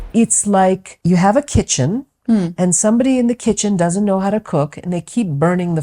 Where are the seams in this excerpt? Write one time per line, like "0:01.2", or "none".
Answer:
0:00.9